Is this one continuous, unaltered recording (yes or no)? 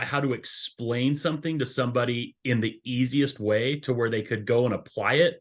yes